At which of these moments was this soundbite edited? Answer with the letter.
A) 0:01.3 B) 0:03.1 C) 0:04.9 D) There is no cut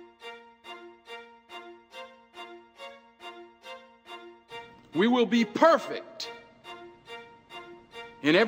A